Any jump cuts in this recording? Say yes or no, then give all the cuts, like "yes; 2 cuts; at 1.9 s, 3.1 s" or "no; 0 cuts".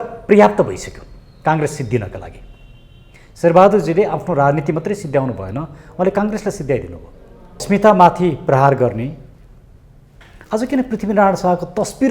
yes; 1 cut; at 7.6 s